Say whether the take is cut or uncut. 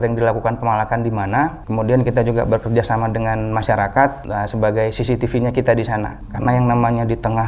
cut